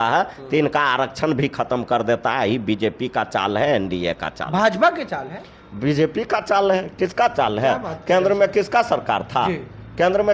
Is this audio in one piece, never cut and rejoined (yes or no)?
yes